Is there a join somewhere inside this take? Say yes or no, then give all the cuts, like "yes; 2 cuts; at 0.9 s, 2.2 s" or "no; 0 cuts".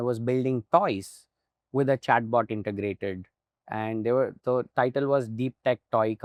no; 0 cuts